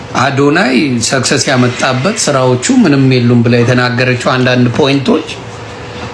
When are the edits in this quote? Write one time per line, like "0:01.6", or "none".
none